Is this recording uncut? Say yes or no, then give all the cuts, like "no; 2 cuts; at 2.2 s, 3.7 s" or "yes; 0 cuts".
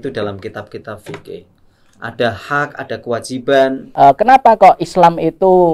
no; 1 cut; at 3.8 s